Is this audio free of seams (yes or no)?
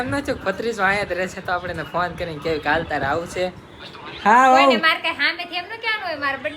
yes